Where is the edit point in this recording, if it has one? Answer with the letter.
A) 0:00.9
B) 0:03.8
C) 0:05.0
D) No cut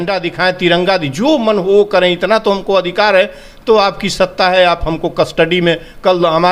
D